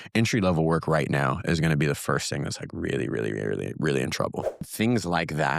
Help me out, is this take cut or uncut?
cut